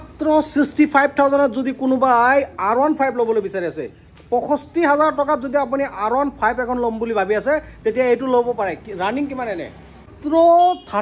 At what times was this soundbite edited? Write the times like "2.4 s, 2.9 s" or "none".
10.1 s